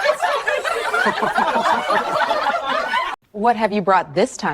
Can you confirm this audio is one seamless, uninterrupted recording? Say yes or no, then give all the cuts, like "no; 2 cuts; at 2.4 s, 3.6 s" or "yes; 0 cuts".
yes; 0 cuts